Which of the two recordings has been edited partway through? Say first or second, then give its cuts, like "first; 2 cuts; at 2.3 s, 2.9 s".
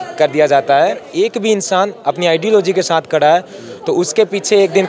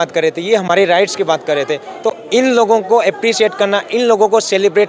first; 1 cut; at 1.1 s